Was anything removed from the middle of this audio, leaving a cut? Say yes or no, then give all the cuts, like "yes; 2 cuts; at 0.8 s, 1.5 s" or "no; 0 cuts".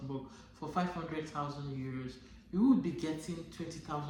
no; 0 cuts